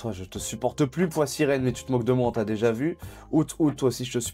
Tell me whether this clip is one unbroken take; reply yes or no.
yes